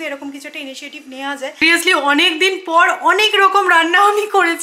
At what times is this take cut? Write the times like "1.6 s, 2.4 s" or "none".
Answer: 1.6 s